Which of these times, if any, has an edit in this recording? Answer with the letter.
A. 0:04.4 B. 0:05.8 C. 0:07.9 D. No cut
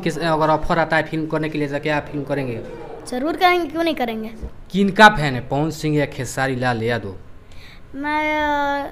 A